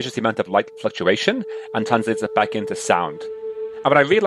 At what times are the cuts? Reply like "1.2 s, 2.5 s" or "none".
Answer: 3.4 s